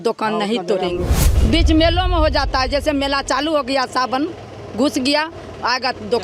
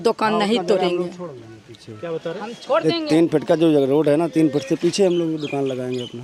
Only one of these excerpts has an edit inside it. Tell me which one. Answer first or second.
first